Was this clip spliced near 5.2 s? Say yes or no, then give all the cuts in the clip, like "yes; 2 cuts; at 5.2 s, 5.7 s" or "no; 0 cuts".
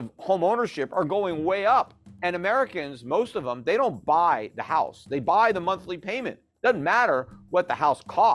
no; 1 cut; at 2.0 s